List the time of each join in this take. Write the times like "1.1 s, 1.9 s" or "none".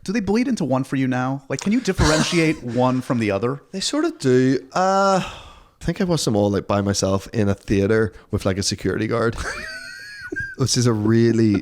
5.8 s